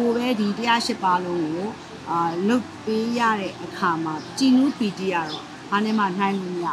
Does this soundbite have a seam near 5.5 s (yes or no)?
no